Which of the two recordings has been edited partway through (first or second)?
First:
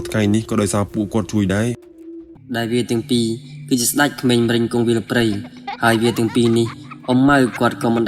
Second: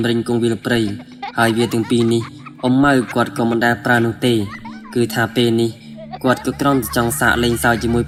first